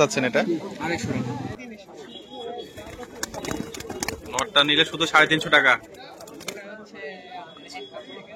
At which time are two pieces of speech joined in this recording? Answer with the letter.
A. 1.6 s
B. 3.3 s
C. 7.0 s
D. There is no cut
A